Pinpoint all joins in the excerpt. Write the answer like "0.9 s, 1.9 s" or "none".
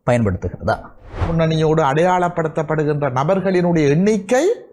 1.3 s